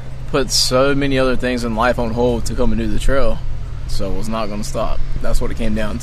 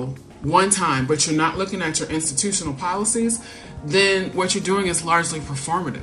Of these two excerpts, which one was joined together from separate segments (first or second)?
first